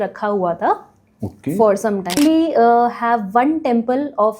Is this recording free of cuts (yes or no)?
no